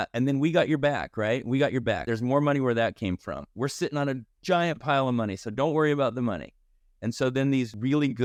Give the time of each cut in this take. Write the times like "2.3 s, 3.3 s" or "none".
none